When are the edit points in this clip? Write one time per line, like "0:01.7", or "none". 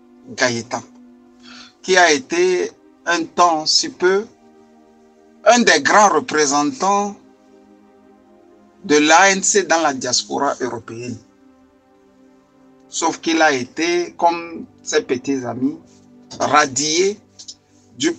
0:07.2
0:08.8
0:11.2
0:13.0